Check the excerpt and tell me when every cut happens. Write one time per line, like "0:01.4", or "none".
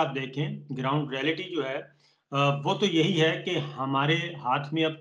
none